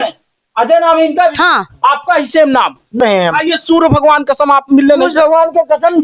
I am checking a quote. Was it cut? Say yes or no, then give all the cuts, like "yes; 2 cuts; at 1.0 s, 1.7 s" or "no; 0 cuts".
yes; 1 cut; at 3.0 s